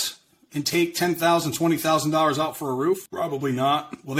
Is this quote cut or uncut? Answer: cut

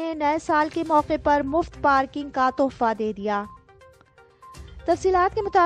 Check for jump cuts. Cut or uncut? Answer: uncut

